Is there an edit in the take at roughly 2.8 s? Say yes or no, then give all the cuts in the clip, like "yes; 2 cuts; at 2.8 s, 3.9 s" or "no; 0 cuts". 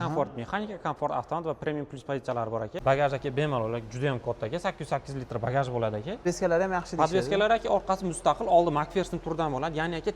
yes; 2 cuts; at 2.8 s, 6.2 s